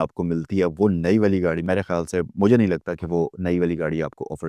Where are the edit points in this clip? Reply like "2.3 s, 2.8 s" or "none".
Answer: 1.6 s